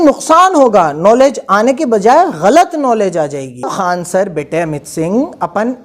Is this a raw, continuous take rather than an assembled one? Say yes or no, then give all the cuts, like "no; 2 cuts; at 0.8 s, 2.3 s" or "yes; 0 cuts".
no; 1 cut; at 3.7 s